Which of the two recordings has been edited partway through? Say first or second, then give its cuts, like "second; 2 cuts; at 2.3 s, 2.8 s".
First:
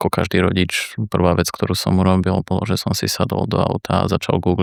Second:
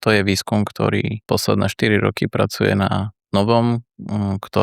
second; 1 cut; at 1.3 s